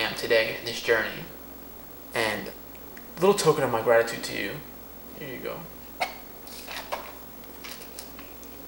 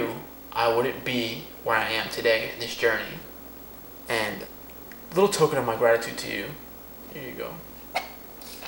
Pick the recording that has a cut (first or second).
first